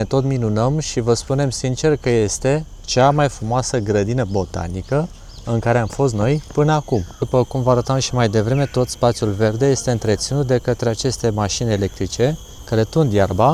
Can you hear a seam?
no; 0 cuts

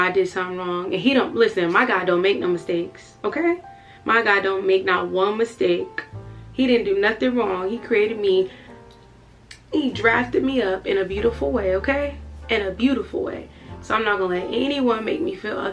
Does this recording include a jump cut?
no; 0 cuts

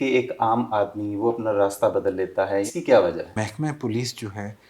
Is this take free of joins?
no; 2 cuts; at 2.7 s, 3.4 s

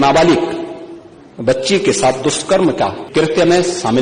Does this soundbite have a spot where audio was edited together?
yes; 1 cut; at 3.0 s

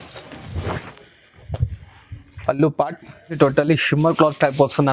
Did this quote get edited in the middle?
yes; 1 cut; at 3.4 s

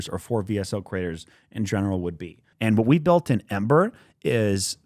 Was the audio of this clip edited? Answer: yes; 1 cut; at 2.4 s

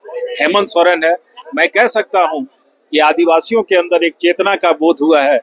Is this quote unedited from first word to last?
yes; 0 cuts

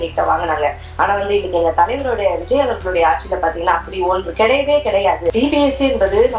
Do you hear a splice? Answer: yes; 1 cut; at 5.3 s

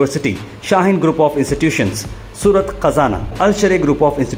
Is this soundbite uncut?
yes; 0 cuts

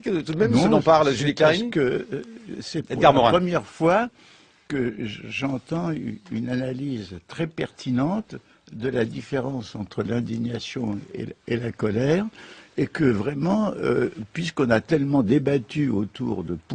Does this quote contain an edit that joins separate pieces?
yes; 1 cut; at 3.8 s

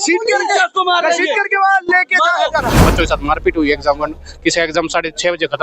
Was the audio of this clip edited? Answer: yes; 1 cut; at 2.9 s

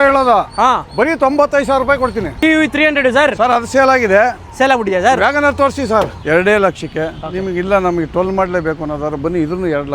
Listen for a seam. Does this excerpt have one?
yes; 2 cuts; at 2.4 s, 6.2 s

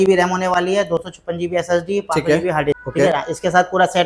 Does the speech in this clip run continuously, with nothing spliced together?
no; 1 cut; at 2.8 s

